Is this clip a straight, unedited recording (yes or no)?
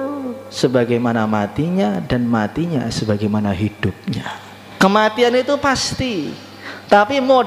no